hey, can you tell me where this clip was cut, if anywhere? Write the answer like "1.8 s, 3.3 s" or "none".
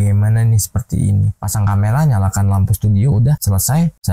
1.4 s